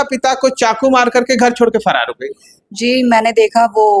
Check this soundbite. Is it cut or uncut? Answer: uncut